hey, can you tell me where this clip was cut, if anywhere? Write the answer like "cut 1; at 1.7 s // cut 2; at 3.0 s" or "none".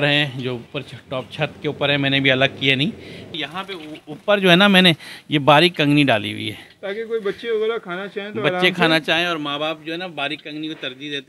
cut 1; at 3.3 s